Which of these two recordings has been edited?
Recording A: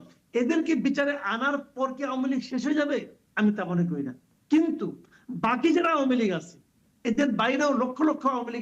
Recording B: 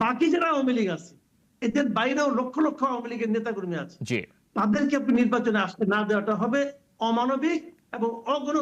A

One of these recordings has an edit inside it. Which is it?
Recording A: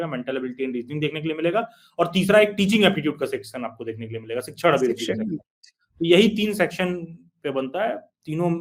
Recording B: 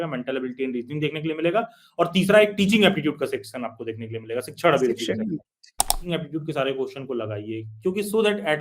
B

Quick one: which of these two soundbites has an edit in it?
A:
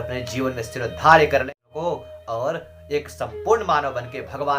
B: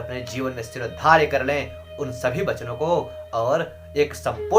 A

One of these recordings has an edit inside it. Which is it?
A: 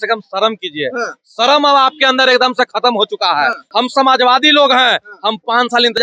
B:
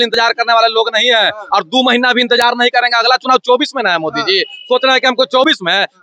A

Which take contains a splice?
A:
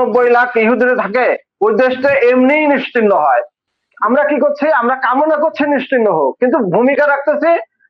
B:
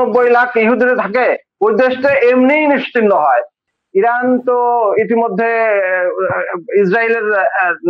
B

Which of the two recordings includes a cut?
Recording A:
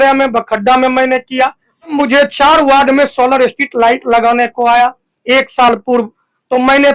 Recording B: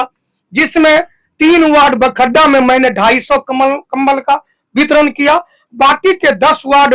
A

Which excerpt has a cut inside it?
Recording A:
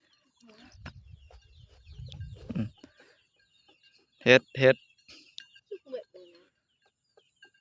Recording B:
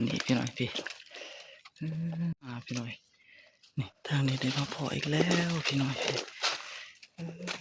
B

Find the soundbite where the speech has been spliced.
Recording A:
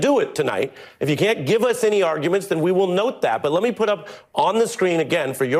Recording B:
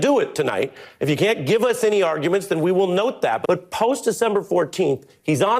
B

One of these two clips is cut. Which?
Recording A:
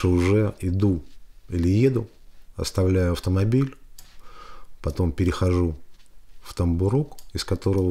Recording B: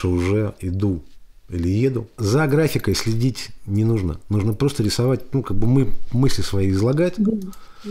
B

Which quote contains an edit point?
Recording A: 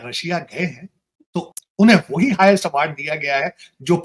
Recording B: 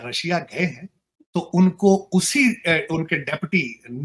A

